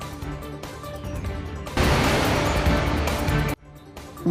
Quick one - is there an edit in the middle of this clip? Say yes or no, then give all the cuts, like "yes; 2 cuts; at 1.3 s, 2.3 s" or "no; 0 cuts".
yes; 1 cut; at 1.7 s